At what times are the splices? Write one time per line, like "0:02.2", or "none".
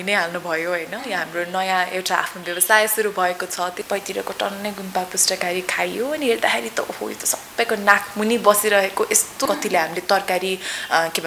0:03.8
0:09.4